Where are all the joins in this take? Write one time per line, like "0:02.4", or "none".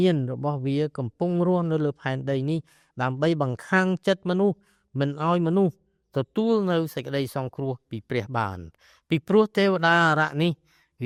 none